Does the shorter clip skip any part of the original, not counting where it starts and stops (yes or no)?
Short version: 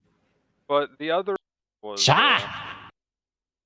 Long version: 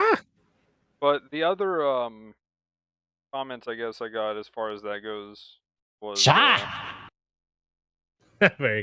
yes